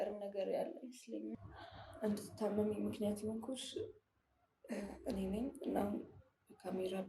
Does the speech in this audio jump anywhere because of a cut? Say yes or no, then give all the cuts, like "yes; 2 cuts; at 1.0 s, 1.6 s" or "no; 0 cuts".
yes; 1 cut; at 1.3 s